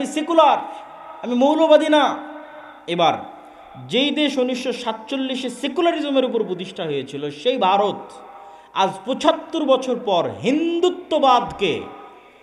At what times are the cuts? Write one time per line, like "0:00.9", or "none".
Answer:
none